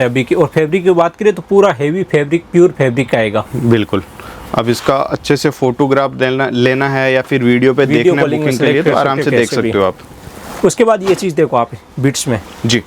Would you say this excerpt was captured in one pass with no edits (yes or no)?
yes